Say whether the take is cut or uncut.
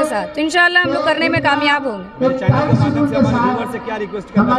uncut